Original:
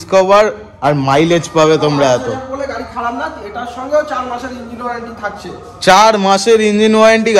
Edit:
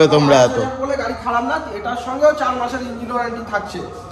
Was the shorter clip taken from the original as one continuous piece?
yes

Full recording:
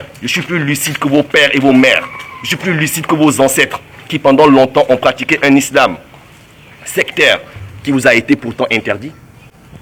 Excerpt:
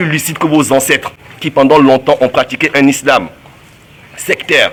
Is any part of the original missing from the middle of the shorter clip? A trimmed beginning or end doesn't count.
no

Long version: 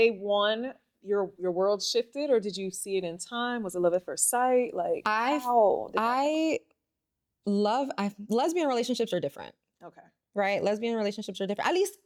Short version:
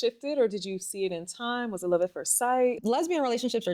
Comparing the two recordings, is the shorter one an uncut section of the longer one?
no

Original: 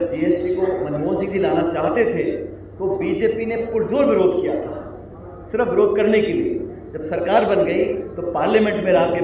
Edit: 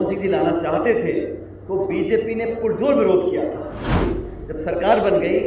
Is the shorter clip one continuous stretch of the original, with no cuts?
no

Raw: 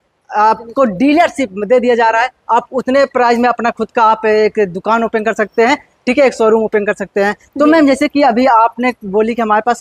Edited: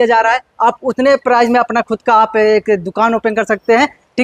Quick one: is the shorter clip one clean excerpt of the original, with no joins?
yes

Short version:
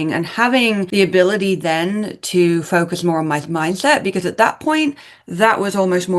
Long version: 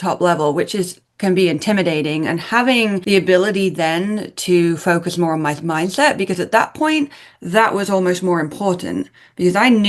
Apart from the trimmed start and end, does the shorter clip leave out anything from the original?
no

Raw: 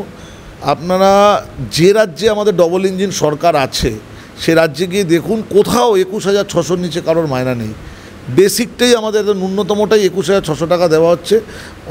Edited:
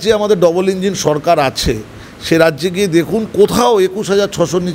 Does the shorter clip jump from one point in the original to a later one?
no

